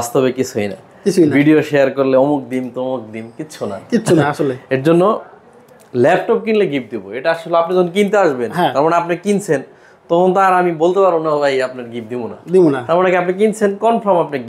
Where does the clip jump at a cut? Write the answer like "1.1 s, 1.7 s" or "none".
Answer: none